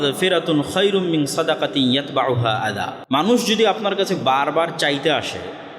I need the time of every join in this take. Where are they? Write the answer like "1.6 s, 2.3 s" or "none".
3.0 s